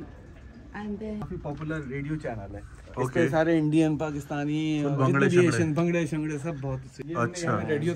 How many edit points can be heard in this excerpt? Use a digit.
2